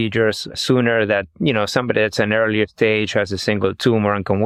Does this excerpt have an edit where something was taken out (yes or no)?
no